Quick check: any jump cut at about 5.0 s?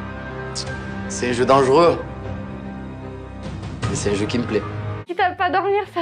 yes; 1 cut; at 5.0 s

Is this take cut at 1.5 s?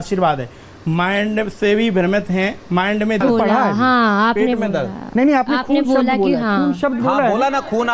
no; 1 cut; at 3.2 s

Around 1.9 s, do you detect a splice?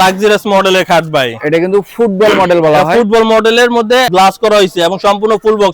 no; 1 cut; at 4.1 s

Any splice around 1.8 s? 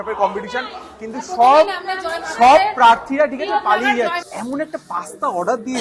no; 1 cut; at 4.3 s

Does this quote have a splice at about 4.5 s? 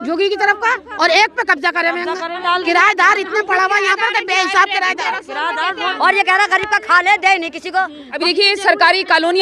no; 3 cuts; at 2.4 s, 5.9 s, 8.0 s

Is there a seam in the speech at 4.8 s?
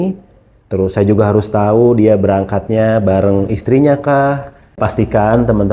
yes; 1 cut; at 4.8 s

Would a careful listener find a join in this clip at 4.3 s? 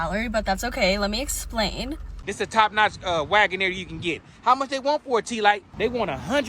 no; 2 cuts; at 2.1 s, 5.7 s

